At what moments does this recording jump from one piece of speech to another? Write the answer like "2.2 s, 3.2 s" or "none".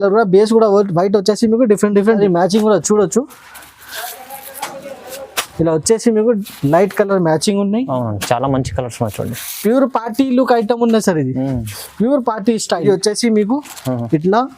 2.2 s, 12.8 s

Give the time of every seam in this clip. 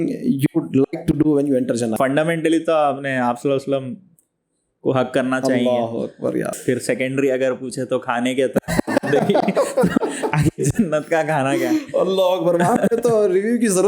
1.9 s, 6.5 s

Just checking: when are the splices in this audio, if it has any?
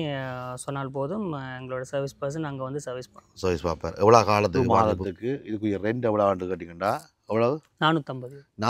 4.5 s

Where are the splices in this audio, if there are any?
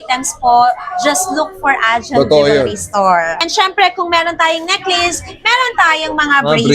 3.4 s

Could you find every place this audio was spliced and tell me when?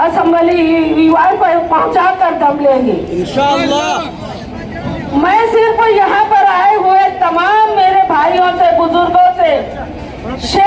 none

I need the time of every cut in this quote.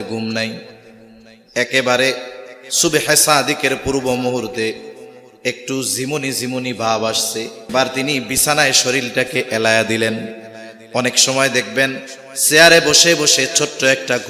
7.7 s

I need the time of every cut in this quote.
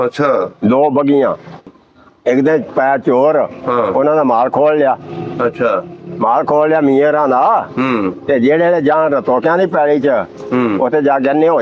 1.6 s

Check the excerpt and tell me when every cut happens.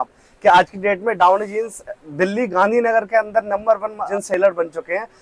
none

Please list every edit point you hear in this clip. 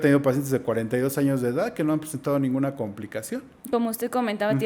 none

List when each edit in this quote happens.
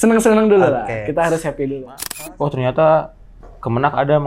2.1 s

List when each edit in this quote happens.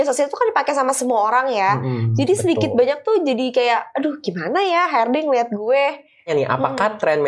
6.3 s

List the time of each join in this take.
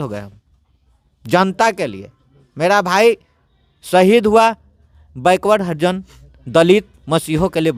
none

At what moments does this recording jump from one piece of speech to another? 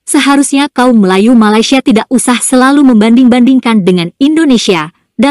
none

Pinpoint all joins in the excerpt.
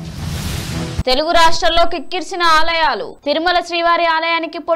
0.9 s

